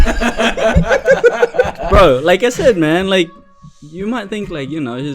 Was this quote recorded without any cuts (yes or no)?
yes